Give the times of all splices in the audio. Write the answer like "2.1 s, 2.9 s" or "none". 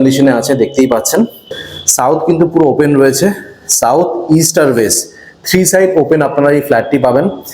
1.6 s